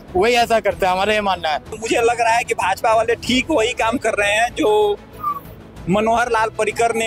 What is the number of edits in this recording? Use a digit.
1